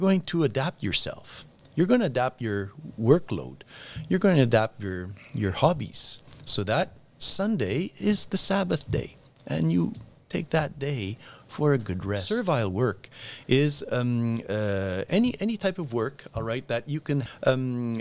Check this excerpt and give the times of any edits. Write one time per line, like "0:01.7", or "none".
0:12.2
0:17.2

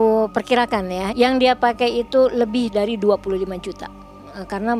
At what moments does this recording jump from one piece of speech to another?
0:01.1

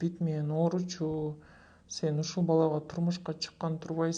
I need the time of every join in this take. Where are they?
none

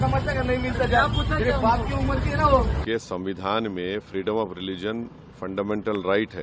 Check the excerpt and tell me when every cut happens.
0:02.8

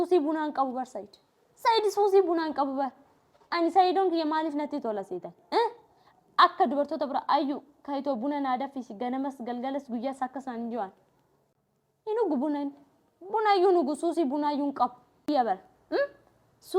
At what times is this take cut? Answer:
0:15.3

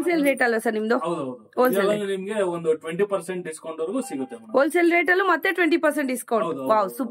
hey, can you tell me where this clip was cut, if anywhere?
none

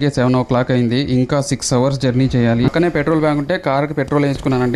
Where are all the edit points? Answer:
0:02.7

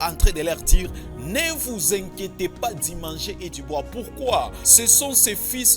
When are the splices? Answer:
0:04.6

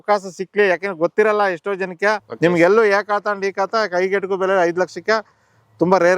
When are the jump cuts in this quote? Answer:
0:02.3

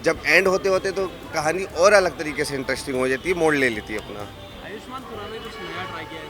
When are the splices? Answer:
none

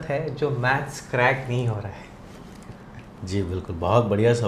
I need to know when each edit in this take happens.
none

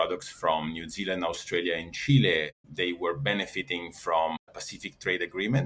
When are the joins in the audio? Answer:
none

